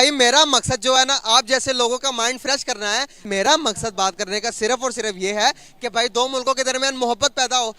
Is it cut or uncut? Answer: cut